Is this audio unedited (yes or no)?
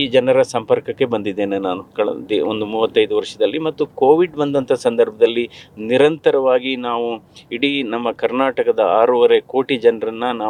yes